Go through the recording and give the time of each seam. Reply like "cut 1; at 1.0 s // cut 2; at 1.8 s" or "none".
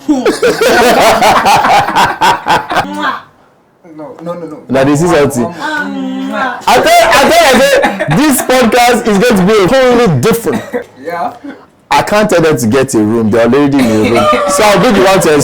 cut 1; at 2.9 s // cut 2; at 9.7 s // cut 3; at 10.9 s